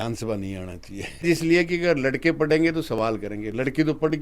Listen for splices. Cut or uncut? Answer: cut